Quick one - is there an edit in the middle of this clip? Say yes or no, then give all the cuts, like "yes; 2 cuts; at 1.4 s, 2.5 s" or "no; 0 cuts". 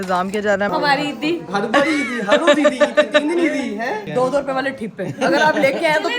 yes; 2 cuts; at 0.7 s, 4.1 s